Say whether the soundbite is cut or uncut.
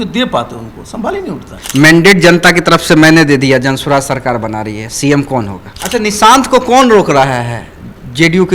cut